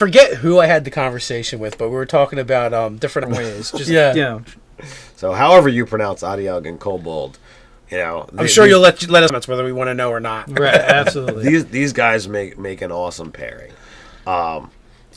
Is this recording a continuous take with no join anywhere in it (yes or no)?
yes